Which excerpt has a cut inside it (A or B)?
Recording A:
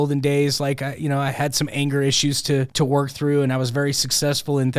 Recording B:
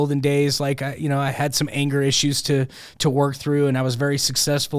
A